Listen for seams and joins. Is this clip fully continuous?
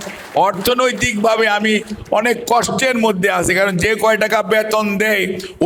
yes; 0 cuts

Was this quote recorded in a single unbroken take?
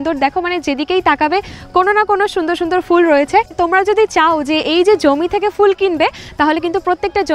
no; 1 cut; at 3.5 s

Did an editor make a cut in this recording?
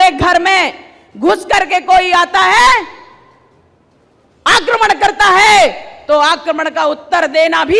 no; 0 cuts

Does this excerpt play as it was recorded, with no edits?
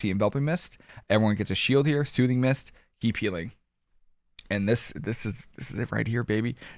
yes; 0 cuts

